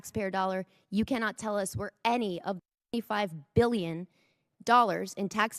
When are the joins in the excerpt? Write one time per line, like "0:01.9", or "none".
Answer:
none

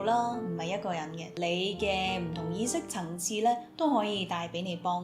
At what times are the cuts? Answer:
0:01.3

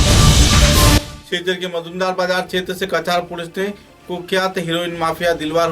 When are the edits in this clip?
0:01.1

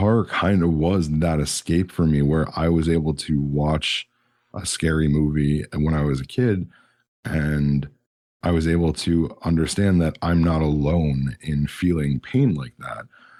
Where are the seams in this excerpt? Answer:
none

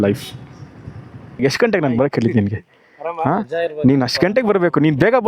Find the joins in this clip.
0:01.4

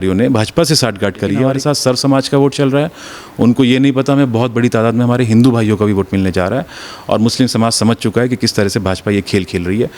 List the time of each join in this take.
0:01.4

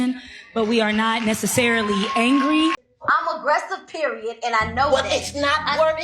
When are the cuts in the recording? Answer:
0:02.9

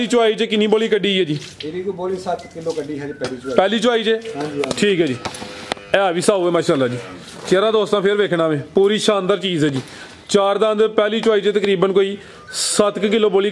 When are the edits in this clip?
none

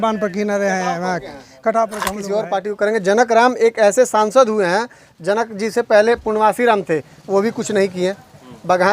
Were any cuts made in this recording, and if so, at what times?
0:02.2

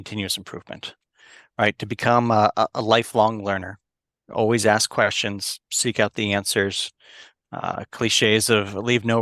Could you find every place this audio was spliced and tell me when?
none

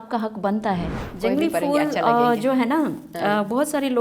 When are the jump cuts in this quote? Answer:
0:01.0

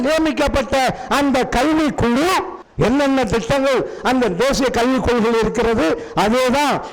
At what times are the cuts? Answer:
0:02.6

